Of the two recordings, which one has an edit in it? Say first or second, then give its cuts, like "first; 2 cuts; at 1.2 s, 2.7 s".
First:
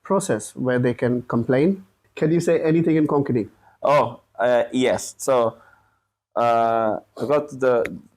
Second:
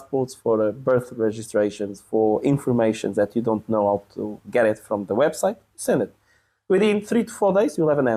first; 1 cut; at 2.1 s